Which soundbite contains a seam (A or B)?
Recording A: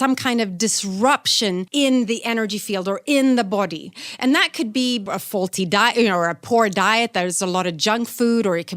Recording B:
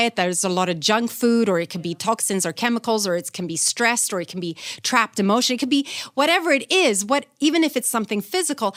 A